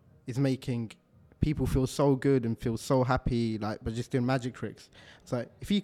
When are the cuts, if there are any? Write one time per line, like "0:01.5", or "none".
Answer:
none